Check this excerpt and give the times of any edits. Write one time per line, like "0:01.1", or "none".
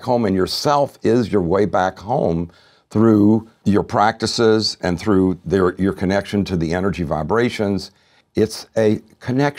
0:03.5
0:08.2